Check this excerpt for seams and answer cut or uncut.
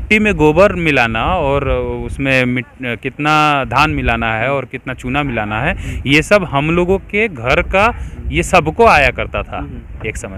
uncut